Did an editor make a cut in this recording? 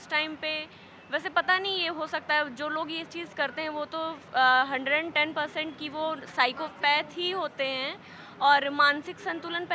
no; 0 cuts

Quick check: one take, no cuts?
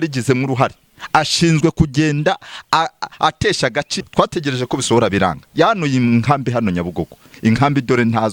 no; 1 cut; at 3.9 s

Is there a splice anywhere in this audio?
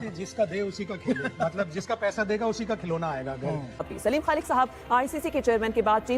yes; 1 cut; at 3.9 s

